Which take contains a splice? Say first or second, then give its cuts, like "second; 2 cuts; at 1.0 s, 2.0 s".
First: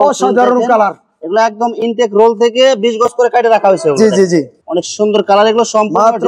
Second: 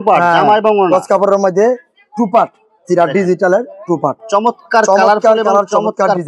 first; 1 cut; at 4.6 s